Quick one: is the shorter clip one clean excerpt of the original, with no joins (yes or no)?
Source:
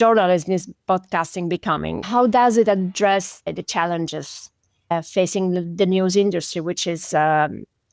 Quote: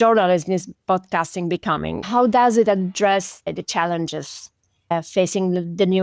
yes